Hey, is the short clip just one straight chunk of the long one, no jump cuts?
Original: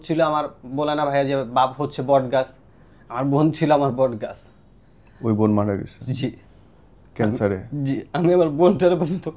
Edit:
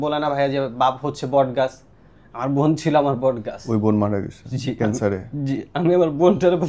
no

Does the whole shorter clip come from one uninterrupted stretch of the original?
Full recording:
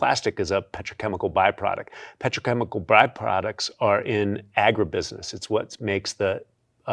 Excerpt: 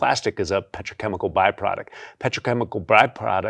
yes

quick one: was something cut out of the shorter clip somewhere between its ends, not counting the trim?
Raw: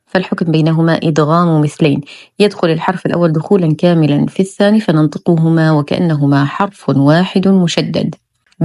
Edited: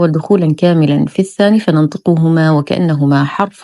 no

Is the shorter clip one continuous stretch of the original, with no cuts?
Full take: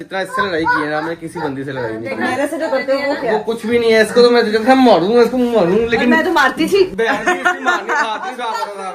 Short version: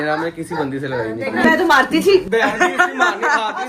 no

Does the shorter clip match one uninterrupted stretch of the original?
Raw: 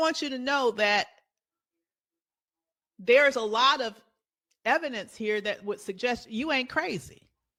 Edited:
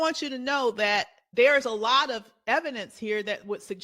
no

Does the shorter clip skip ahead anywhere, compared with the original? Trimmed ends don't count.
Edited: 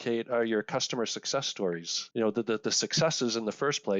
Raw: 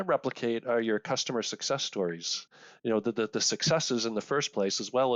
yes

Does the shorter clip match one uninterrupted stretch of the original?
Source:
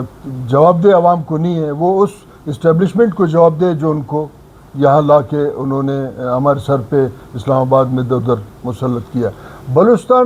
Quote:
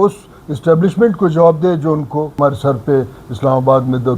no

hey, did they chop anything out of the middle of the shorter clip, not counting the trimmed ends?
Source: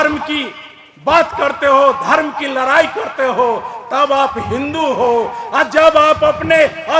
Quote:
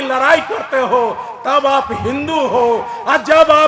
no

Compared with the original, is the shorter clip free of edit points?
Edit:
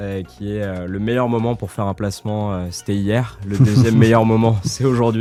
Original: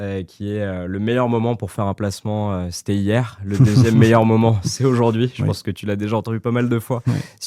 yes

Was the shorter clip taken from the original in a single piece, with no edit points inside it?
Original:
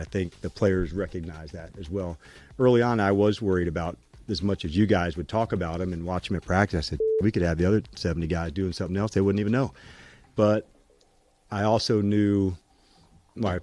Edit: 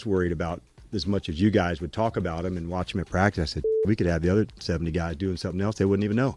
yes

